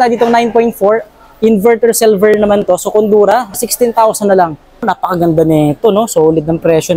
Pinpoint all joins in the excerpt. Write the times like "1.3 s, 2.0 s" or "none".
3.6 s, 4.8 s